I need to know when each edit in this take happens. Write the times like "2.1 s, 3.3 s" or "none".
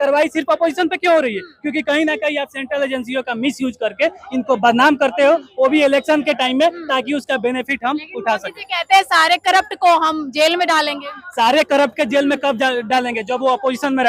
none